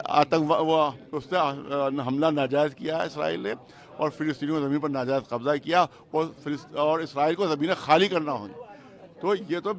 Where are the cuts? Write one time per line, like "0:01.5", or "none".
none